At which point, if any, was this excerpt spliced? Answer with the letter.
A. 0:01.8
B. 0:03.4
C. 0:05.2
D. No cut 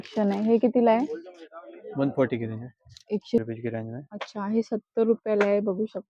B